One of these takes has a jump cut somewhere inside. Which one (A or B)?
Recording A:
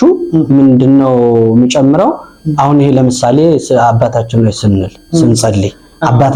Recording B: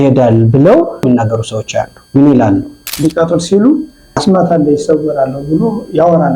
B